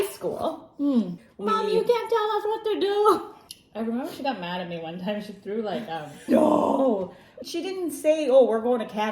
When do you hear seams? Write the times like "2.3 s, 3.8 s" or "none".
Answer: 1.2 s, 3.3 s, 6.3 s, 7.4 s